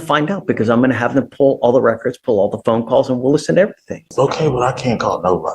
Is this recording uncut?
no; 1 cut; at 4.1 s

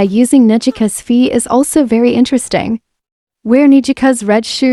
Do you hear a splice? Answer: no; 0 cuts

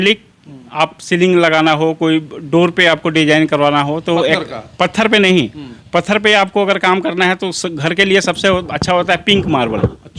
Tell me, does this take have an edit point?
no; 0 cuts

